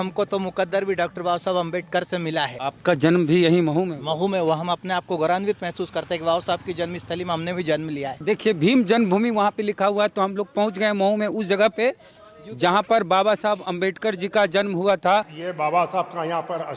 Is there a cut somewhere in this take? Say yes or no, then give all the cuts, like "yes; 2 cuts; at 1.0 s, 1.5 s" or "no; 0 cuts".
yes; 3 cuts; at 2.6 s, 8.2 s, 15.4 s